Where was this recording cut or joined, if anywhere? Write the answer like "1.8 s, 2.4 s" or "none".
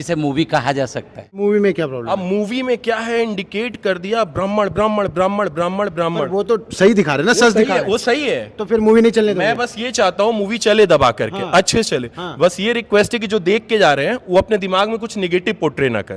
1.2 s